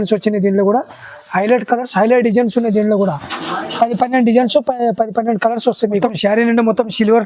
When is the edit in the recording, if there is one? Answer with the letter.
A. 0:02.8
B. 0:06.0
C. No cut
B